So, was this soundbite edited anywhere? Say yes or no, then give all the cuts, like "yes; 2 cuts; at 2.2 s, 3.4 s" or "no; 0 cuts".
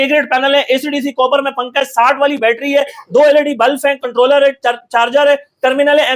no; 0 cuts